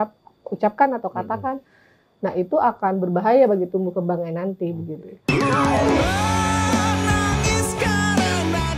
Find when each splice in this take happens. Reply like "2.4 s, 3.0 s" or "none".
5.0 s